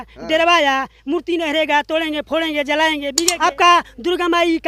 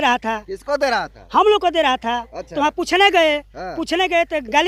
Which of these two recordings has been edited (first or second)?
first